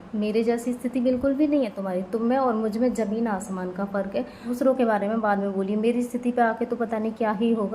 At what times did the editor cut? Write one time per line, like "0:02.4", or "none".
0:04.5